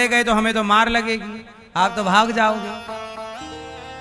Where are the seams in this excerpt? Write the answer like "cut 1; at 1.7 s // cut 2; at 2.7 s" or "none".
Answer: none